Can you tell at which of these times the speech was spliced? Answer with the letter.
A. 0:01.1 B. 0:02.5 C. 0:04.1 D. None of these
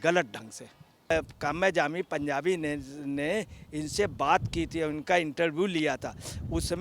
A